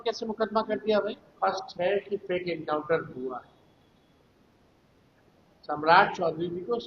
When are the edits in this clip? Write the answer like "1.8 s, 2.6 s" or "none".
1.3 s